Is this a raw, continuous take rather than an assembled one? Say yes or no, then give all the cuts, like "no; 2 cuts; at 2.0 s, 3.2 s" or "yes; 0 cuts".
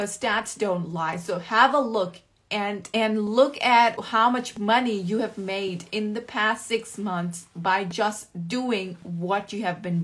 no; 2 cuts; at 2.8 s, 4.0 s